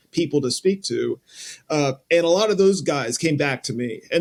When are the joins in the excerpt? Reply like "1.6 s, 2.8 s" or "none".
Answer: none